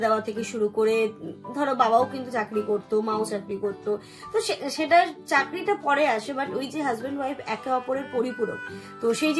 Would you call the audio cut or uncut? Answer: uncut